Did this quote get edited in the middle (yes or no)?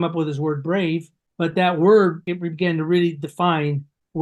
yes